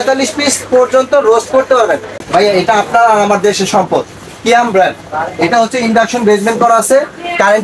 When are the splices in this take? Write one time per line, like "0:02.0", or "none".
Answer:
0:02.1